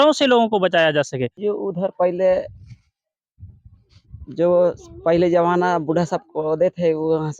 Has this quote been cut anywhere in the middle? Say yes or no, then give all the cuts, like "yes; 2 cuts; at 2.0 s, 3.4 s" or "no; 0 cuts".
yes; 1 cut; at 1.4 s